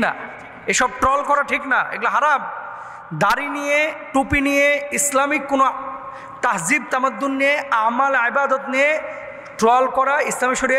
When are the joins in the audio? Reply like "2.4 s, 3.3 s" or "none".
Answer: none

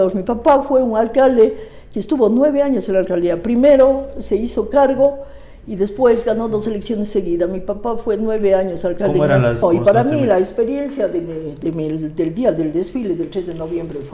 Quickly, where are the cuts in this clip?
9.6 s

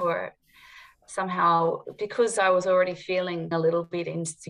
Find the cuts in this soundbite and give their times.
3.5 s

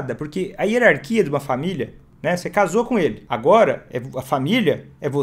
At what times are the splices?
3.3 s

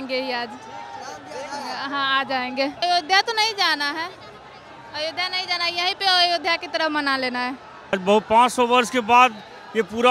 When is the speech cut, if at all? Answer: 2.8 s, 8.0 s

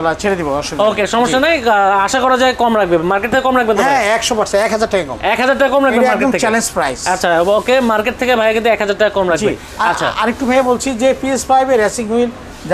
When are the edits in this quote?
none

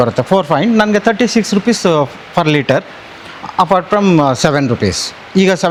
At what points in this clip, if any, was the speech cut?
none

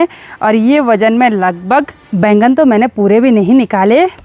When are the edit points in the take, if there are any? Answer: 2.0 s

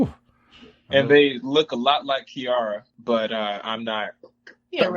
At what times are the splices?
2.9 s

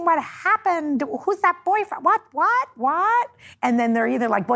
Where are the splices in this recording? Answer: 3.4 s

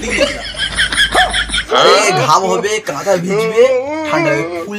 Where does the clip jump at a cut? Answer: 1.6 s

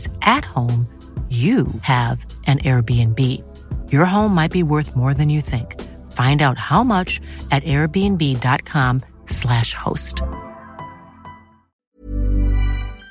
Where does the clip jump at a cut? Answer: 11.8 s

